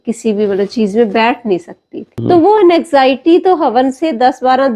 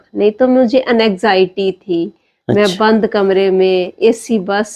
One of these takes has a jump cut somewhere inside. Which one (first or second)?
first